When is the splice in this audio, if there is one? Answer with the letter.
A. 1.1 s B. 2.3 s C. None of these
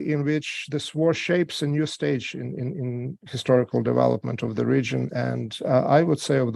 C